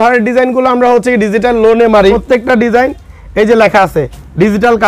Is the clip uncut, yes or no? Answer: no